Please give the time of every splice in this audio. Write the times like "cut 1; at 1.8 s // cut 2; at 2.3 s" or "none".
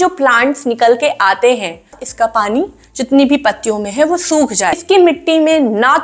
cut 1; at 2.0 s // cut 2; at 4.8 s